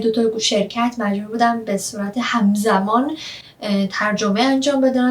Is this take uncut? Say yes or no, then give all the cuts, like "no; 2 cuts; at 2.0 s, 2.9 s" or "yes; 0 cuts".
yes; 0 cuts